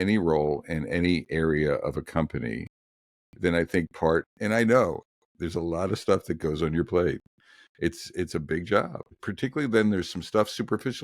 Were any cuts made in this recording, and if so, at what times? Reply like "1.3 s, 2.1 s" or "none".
4.3 s, 9.2 s